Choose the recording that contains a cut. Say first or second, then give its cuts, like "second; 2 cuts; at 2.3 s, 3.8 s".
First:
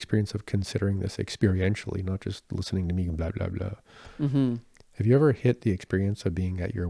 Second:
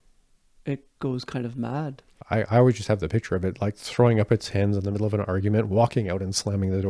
second; 1 cut; at 2.1 s